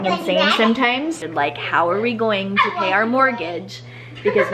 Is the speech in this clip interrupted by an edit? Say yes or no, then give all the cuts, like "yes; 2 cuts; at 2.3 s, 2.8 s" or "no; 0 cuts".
yes; 1 cut; at 1.2 s